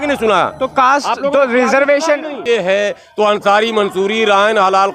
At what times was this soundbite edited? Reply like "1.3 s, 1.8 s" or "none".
2.4 s